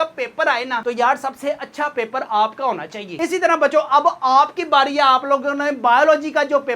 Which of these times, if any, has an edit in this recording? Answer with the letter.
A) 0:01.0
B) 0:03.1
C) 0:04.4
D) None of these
B